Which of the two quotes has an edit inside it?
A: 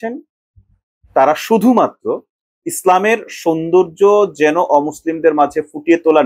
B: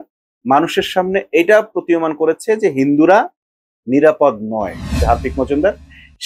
B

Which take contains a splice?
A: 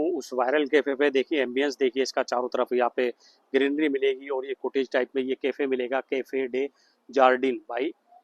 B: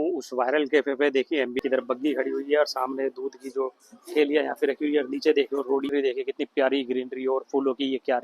B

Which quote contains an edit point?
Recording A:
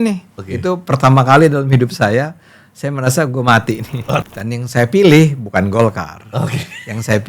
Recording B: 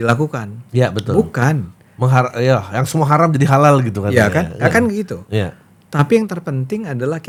A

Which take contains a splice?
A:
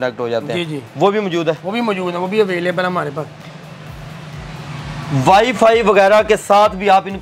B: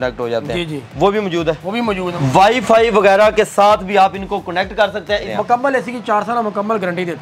B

